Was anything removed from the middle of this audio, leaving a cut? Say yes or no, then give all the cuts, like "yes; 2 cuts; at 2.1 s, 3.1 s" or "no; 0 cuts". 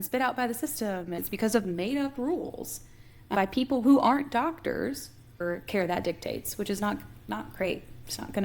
yes; 2 cuts; at 1.2 s, 5.4 s